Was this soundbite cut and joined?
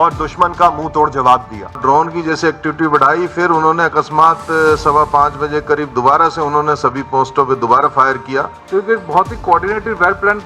yes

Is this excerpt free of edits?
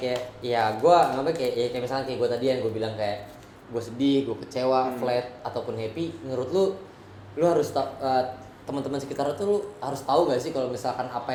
yes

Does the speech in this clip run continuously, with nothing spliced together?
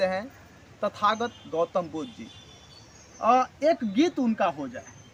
yes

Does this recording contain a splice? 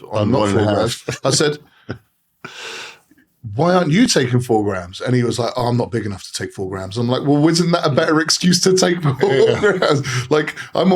no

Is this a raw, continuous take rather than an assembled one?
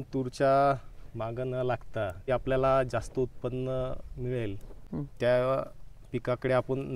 no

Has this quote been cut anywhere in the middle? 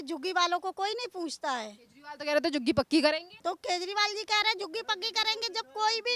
yes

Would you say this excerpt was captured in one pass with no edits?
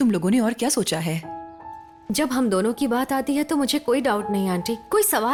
yes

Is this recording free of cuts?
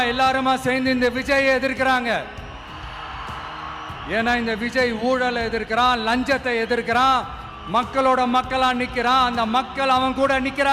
yes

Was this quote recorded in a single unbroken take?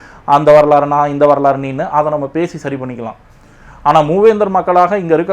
yes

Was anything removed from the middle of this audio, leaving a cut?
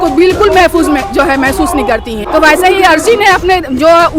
yes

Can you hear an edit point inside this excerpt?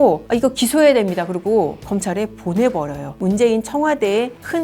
yes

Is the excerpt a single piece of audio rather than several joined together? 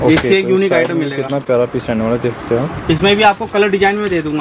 yes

